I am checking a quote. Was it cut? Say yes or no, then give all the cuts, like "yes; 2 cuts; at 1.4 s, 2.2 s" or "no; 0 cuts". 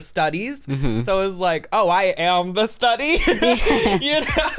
no; 0 cuts